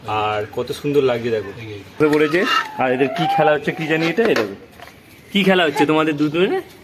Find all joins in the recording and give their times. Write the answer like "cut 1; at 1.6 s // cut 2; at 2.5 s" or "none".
cut 1; at 2.0 s